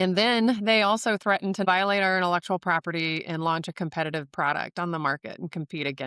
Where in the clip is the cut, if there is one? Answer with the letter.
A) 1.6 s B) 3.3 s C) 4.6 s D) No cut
A